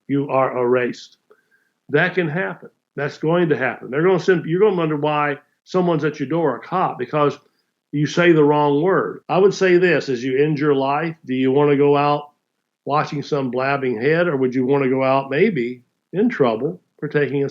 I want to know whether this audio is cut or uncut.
cut